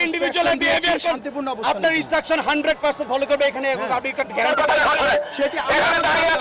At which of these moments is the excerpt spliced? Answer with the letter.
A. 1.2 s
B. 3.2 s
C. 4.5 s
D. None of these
C